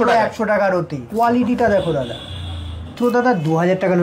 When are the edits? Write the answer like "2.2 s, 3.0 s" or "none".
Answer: 1.0 s, 2.9 s

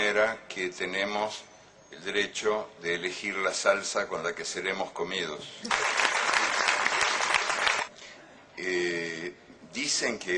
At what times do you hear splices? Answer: 1.7 s

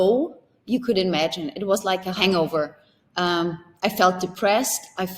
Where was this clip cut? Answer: 2.2 s

